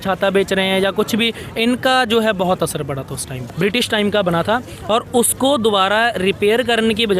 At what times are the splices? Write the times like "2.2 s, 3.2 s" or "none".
3.3 s